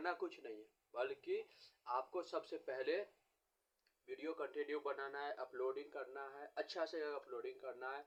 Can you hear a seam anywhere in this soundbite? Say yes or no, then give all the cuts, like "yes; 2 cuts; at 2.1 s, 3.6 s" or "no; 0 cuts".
no; 0 cuts